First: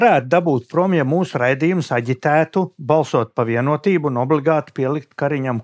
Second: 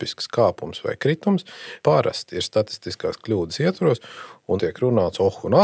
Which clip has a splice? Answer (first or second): second